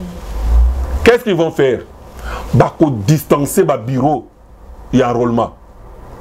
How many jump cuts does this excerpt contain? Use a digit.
0